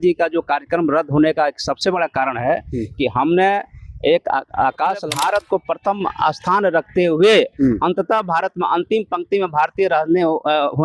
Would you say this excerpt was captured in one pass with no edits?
no; 1 cut; at 5.1 s

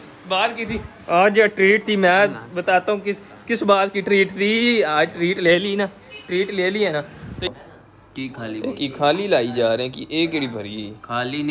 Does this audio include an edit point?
yes; 2 cuts; at 5.7 s, 7.5 s

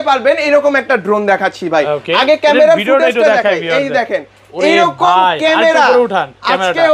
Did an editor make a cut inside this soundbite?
no; 0 cuts

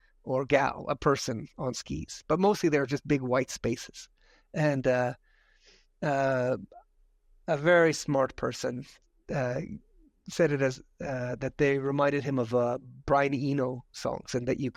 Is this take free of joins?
yes; 0 cuts

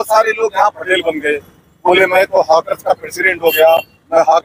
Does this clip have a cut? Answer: no; 0 cuts

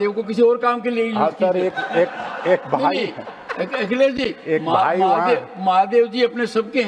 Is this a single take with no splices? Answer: yes; 0 cuts

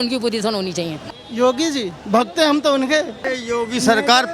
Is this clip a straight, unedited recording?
no; 2 cuts; at 1.1 s, 3.3 s

